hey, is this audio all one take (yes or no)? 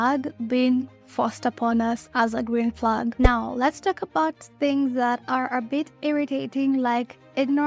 no